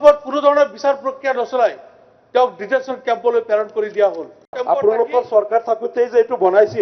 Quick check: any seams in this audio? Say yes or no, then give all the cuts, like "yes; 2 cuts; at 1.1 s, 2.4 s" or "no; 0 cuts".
yes; 1 cut; at 4.6 s